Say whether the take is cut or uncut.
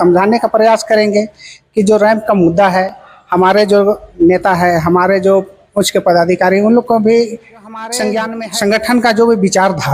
cut